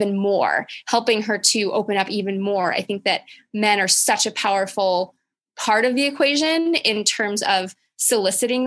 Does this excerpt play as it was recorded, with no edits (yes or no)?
yes